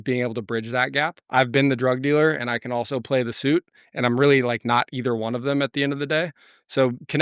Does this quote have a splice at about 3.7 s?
no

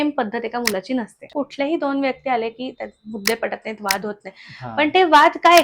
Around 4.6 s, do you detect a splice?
no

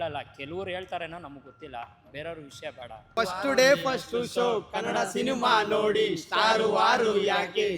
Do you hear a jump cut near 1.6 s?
no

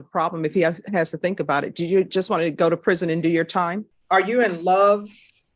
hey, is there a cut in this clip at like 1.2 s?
no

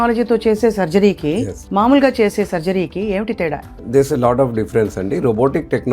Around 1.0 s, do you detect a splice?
no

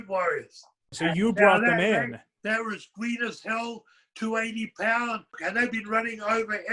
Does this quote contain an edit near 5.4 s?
yes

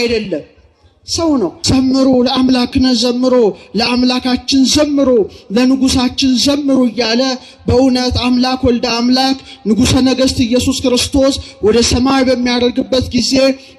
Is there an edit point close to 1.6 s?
yes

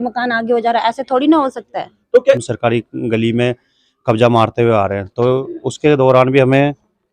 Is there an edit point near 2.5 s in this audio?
yes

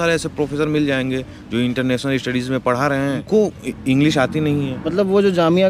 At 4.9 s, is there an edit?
yes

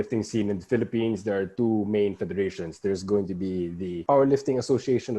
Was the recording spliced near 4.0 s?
yes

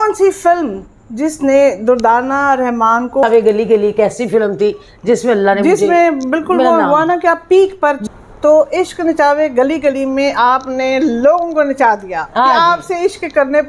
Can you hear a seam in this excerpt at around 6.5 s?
no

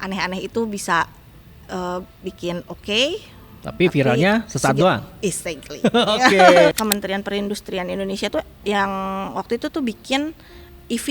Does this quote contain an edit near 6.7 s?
yes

